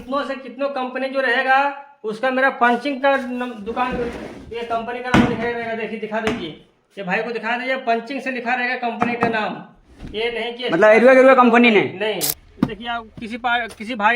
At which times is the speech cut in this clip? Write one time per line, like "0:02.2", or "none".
0:12.4